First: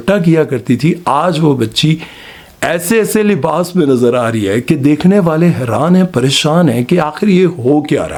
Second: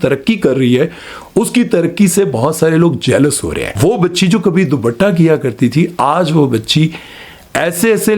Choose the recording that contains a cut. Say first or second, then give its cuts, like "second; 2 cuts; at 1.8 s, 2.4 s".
second; 1 cut; at 3.6 s